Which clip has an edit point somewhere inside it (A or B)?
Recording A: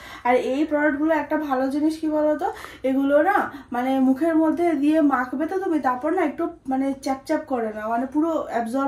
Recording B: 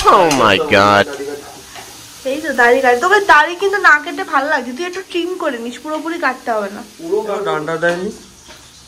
B